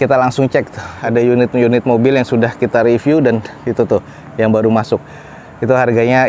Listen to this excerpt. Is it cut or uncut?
cut